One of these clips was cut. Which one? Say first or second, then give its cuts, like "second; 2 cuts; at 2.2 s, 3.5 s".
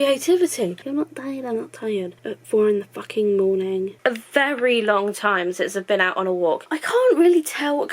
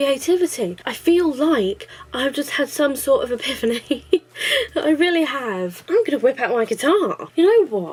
first; 3 cuts; at 0.8 s, 3.9 s, 6.6 s